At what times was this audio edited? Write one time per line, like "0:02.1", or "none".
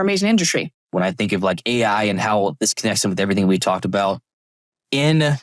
0:00.9